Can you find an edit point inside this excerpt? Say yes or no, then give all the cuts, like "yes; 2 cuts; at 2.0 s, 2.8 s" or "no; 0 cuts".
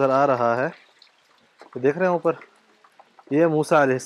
no; 0 cuts